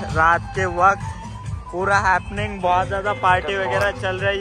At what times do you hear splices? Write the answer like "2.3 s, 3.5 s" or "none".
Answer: none